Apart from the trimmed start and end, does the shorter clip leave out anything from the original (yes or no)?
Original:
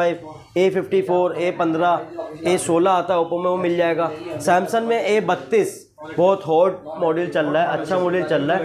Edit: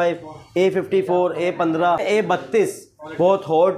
yes